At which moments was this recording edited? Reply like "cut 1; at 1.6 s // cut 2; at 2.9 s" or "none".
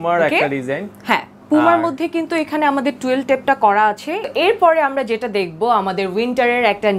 cut 1; at 4.3 s